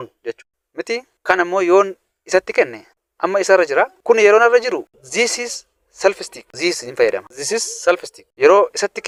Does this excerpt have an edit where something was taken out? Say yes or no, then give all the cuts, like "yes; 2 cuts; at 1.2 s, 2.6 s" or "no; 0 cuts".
no; 0 cuts